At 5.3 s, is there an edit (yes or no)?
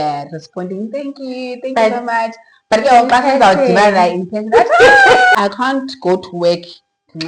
yes